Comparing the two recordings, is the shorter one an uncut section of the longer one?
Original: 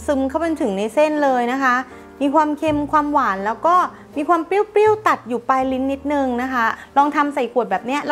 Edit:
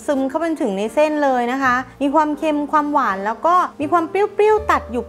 no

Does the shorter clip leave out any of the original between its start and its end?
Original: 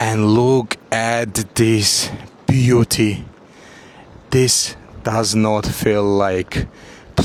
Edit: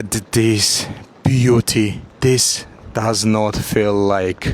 yes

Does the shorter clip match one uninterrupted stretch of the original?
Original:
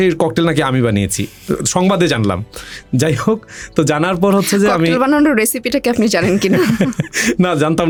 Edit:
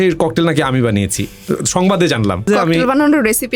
no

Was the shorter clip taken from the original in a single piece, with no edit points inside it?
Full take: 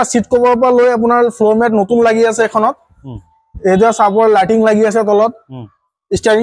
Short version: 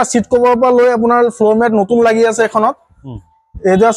yes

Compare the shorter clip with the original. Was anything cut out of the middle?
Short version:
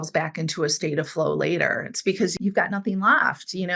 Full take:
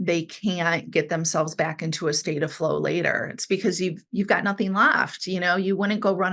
yes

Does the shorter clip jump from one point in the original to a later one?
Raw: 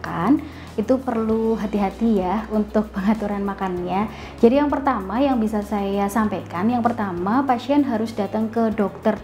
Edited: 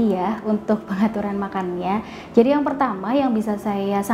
no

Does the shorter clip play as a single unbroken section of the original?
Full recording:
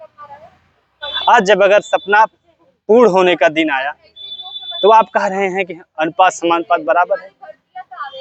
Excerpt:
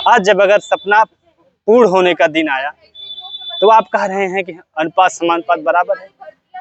yes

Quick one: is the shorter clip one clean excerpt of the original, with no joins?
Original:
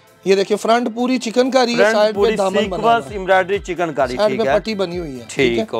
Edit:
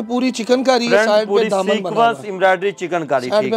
yes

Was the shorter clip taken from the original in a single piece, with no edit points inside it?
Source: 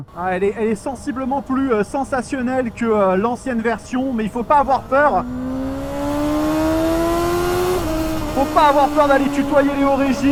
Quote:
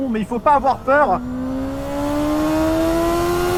yes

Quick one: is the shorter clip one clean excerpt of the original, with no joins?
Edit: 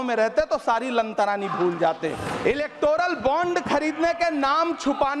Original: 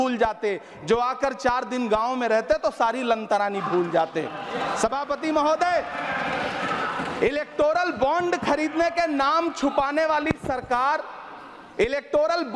no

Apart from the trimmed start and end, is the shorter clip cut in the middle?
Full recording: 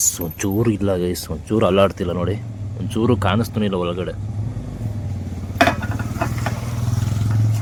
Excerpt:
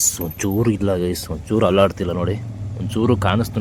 no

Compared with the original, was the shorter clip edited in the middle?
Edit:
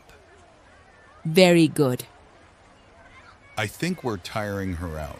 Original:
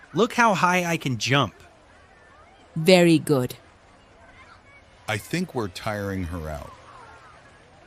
no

